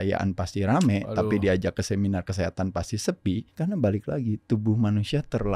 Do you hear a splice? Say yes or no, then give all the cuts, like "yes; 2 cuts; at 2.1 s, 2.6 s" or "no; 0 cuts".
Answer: yes; 1 cut; at 3.5 s